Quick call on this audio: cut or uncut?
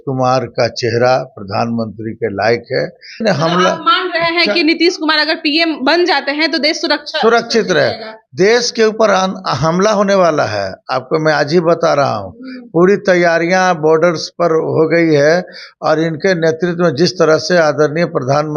cut